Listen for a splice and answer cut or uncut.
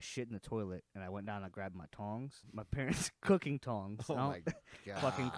cut